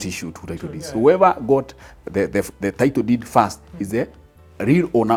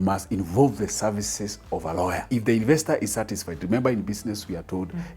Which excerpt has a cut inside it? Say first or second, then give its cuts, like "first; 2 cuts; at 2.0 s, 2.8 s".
second; 1 cut; at 2.2 s